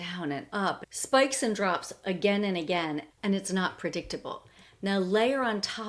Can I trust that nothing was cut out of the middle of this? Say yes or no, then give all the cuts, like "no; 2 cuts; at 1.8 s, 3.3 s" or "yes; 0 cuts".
yes; 0 cuts